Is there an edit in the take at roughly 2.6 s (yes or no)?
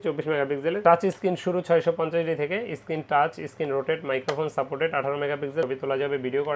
no